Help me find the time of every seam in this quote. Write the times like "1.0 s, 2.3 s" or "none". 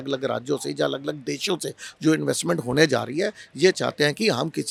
none